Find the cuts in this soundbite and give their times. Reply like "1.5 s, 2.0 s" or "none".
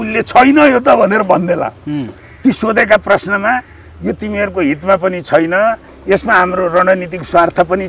none